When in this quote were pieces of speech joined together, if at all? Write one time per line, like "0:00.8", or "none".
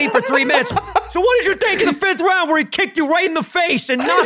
none